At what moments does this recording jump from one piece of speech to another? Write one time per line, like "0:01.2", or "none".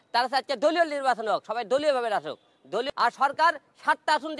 0:02.9